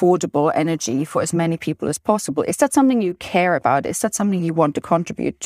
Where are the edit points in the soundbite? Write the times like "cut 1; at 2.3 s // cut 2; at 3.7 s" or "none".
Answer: none